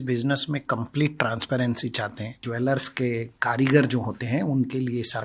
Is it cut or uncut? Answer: cut